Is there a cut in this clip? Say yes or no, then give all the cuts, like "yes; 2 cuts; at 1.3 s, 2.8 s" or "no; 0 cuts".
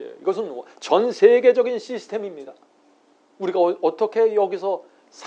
no; 0 cuts